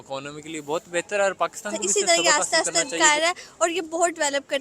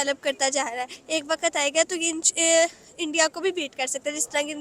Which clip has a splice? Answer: first; 1 cut; at 2.1 s

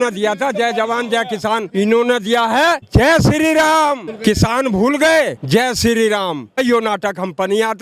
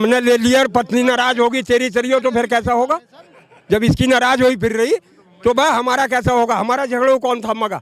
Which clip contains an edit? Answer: first; 5 cuts; at 1.7 s, 2.8 s, 4.1 s, 5.4 s, 6.6 s

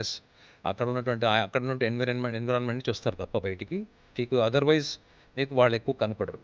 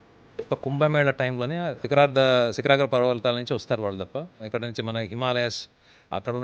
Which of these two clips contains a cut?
second; 2 cuts; at 1.8 s, 4.4 s

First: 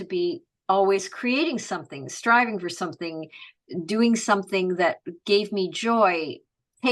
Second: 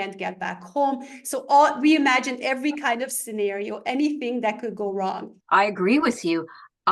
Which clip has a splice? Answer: second; 1 cut; at 5.3 s

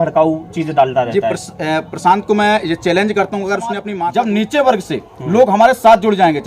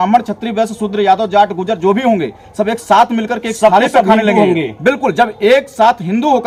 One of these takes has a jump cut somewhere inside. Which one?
first; 1 cut; at 3.9 s

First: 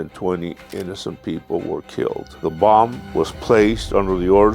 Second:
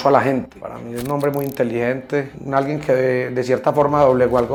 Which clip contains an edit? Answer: first; 1 cut; at 2.3 s

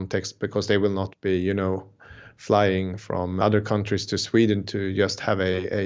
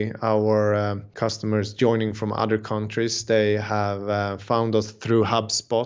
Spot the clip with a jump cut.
first; 1 cut; at 3.4 s

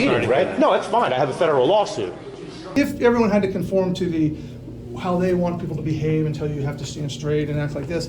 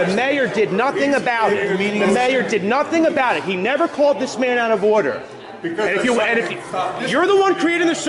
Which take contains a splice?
first; 1 cut; at 2.7 s

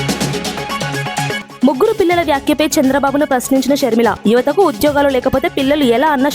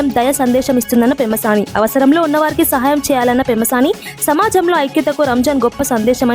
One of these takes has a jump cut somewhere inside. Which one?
first; 1 cut; at 1.4 s

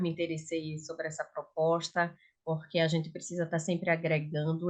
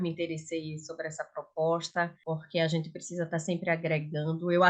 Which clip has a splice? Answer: second; 1 cut; at 2.2 s

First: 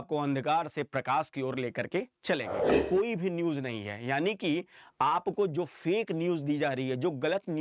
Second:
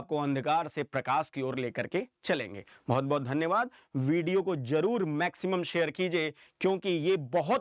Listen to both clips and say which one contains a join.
first; 1 cut; at 2.8 s

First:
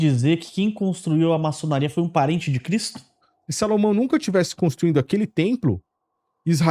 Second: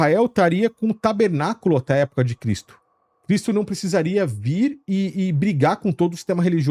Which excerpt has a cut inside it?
first; 1 cut; at 3.2 s

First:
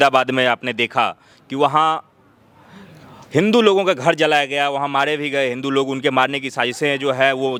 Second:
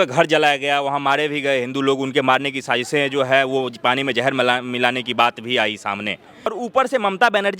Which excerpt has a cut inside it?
second; 1 cut; at 6.6 s

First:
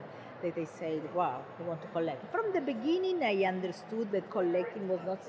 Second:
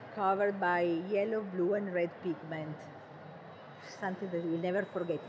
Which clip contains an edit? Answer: first; 2 cuts; at 2.3 s, 4.3 s

